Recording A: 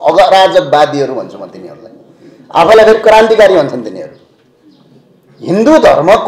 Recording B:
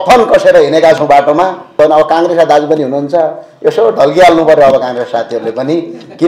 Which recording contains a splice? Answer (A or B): B